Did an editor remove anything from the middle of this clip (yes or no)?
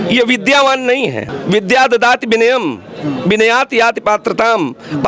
yes